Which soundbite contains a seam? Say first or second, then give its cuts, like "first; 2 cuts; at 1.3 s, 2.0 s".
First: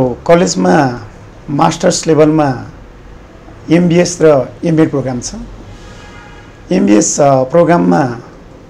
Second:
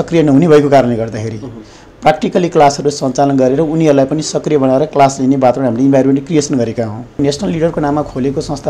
second; 1 cut; at 7.2 s